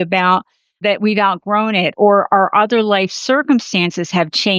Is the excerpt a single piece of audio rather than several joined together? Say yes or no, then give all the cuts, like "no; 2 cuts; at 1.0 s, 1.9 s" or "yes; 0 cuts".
no; 2 cuts; at 0.8 s, 1.9 s